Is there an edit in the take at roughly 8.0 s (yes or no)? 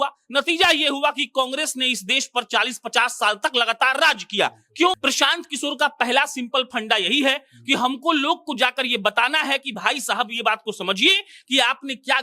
no